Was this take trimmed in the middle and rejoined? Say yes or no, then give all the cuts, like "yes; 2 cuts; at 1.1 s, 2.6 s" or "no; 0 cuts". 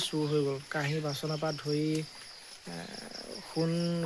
no; 0 cuts